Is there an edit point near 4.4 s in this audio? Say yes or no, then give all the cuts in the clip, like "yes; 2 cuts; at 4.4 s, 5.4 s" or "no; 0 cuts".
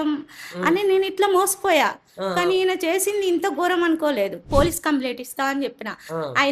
yes; 1 cut; at 4.4 s